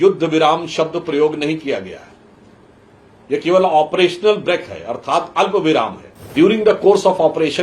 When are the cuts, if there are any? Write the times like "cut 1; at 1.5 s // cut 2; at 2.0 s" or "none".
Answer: cut 1; at 6.3 s